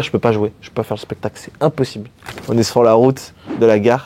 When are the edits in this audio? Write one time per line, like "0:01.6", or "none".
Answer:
0:02.3

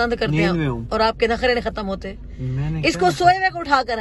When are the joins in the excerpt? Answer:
none

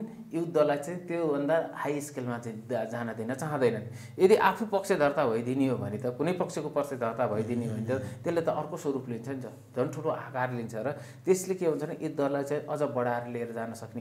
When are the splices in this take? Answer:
none

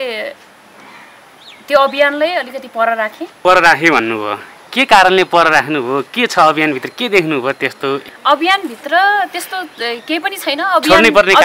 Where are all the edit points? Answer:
0:03.4
0:08.1

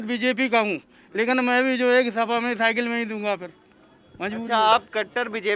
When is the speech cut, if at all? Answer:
none

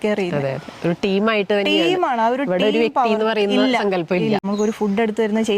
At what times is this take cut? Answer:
0:04.4

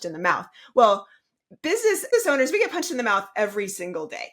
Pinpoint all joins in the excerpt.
0:02.1

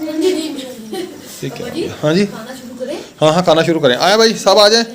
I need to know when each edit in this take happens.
none

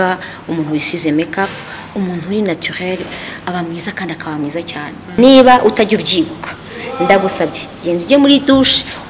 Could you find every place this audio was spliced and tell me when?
0:05.2

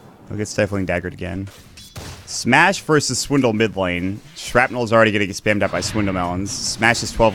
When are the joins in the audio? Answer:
0:02.8

